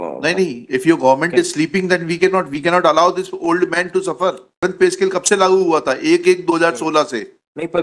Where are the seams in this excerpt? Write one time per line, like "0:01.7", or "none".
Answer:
0:04.6